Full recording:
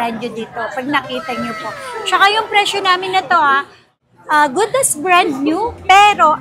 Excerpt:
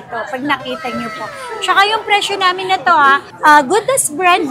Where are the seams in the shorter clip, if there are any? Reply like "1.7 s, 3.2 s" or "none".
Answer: 3.3 s